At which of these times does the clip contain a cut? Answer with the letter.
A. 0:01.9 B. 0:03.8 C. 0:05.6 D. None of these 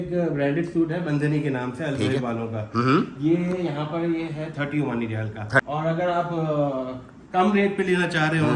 C